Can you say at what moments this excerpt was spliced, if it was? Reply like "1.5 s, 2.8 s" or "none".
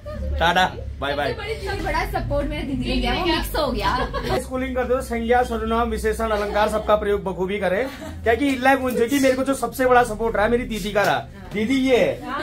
1.8 s, 4.4 s

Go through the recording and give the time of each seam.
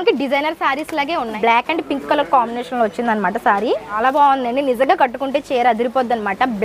1.4 s, 4.0 s

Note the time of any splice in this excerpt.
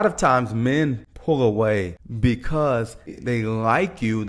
1.1 s, 2.0 s, 3.2 s

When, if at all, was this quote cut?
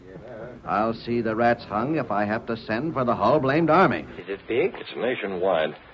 4.1 s

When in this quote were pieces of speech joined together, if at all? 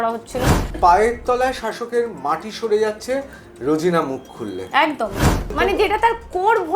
0.8 s, 5.5 s

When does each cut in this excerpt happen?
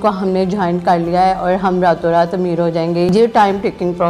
3.1 s

